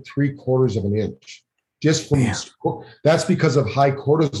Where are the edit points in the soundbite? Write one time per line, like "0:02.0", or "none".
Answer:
none